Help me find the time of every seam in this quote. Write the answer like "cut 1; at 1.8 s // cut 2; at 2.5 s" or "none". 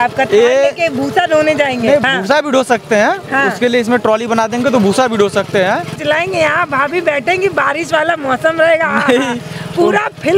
cut 1; at 2.1 s // cut 2; at 6.0 s